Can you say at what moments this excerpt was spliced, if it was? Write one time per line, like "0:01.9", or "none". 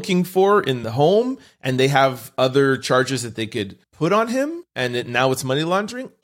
0:00.8
0:03.8
0:04.6